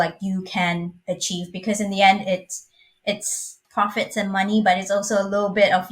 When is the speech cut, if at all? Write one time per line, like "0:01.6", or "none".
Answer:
0:03.6